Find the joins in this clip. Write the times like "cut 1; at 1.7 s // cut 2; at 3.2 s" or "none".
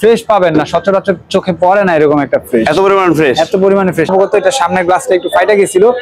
cut 1; at 4.1 s

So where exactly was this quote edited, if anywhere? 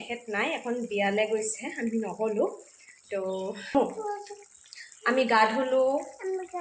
cut 1; at 3.7 s

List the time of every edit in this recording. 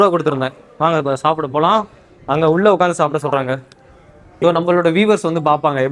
cut 1; at 4.4 s

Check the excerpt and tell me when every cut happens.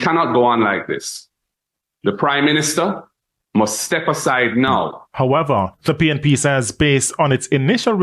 cut 1; at 5.0 s

